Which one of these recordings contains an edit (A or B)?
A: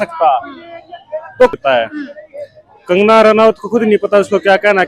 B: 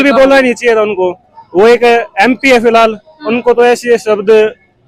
A